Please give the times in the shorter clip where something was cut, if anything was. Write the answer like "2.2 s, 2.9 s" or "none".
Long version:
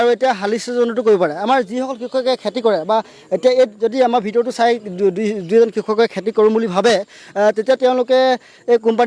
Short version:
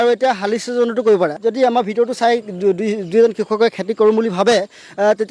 1.4 s